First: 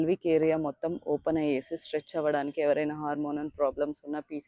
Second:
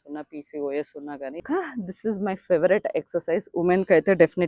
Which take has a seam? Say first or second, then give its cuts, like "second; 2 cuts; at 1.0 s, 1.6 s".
second; 1 cut; at 1.4 s